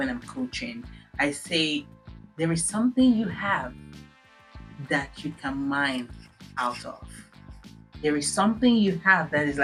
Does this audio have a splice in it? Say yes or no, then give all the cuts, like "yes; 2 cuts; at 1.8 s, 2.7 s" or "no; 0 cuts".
no; 0 cuts